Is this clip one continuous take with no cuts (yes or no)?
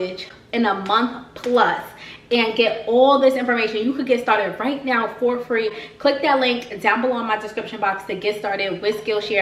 yes